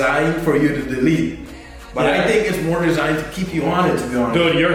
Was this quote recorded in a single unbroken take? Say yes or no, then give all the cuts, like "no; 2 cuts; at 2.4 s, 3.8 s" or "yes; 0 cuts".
yes; 0 cuts